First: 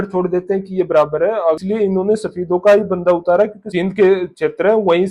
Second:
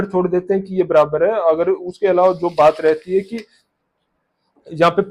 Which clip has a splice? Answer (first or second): first